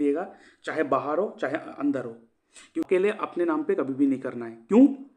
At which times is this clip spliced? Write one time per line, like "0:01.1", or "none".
0:02.8